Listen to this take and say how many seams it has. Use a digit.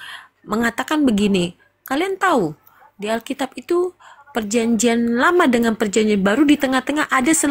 0